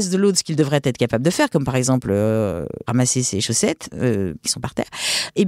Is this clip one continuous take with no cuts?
no; 2 cuts; at 2.8 s, 4.5 s

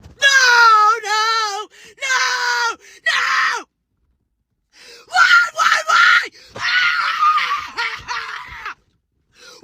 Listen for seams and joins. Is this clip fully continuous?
yes; 0 cuts

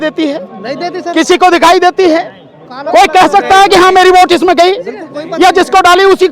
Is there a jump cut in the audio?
no; 0 cuts

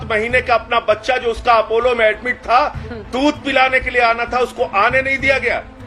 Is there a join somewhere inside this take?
no; 0 cuts

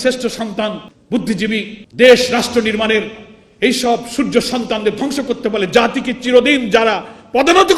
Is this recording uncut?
no; 2 cuts; at 0.9 s, 1.8 s

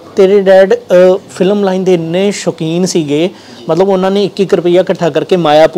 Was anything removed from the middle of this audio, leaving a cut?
no; 0 cuts

